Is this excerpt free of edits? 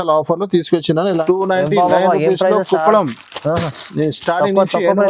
no; 1 cut; at 1.1 s

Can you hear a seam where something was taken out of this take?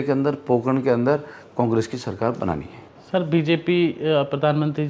no; 0 cuts

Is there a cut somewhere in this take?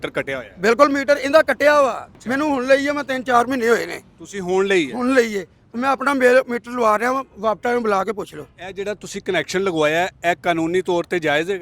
yes; 1 cut; at 2.0 s

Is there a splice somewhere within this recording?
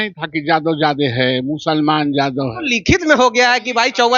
no; 0 cuts

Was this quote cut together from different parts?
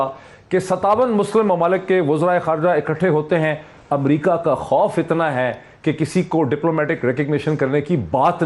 no; 0 cuts

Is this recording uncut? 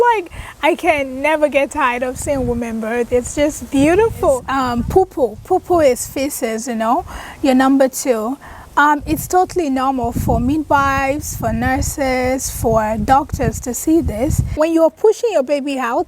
no; 2 cuts; at 4.4 s, 14.4 s

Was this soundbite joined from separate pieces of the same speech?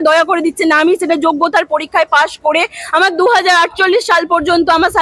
no; 0 cuts

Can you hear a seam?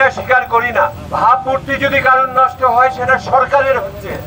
yes; 1 cut; at 1.0 s

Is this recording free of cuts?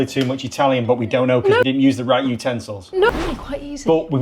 no; 2 cuts; at 1.6 s, 3.1 s

